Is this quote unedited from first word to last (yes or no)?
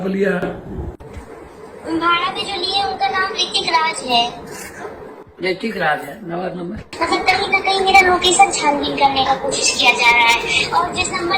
no